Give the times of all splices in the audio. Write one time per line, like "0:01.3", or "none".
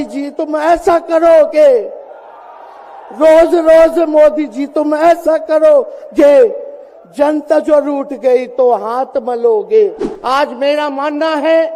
0:10.1